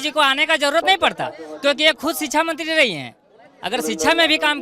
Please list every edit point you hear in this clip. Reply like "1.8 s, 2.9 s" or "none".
none